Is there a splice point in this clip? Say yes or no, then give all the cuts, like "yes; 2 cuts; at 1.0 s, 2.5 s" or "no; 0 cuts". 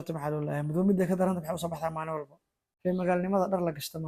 yes; 1 cut; at 2.7 s